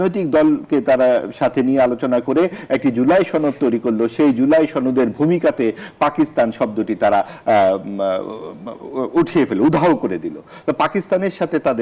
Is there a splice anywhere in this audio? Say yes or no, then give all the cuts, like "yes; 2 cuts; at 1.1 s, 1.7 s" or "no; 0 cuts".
no; 0 cuts